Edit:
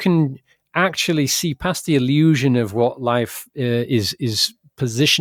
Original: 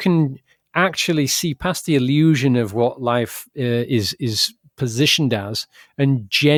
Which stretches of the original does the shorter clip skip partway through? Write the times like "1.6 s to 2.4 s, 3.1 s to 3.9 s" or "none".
none